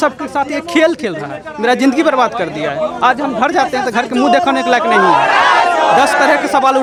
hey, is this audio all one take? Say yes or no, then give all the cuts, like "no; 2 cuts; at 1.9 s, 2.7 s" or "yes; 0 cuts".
yes; 0 cuts